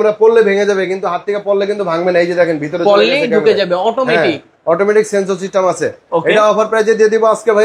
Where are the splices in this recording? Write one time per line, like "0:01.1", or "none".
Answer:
none